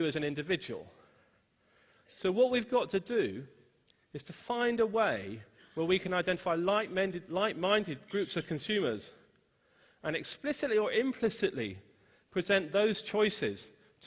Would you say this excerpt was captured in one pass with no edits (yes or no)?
no